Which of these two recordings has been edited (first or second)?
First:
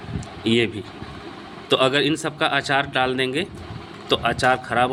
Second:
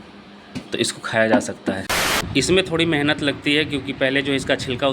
second